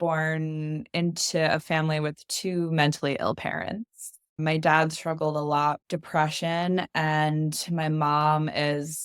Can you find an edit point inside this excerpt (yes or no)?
yes